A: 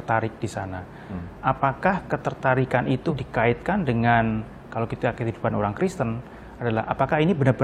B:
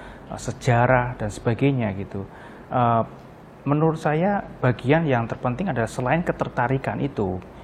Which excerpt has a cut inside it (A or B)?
A